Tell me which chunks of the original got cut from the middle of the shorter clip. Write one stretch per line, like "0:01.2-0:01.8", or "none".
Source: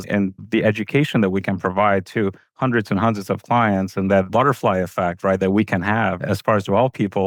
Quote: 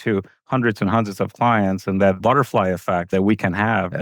0:05.2-0:05.4